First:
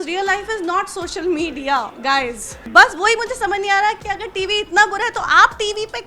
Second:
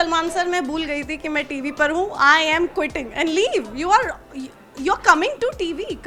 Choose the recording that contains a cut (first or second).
first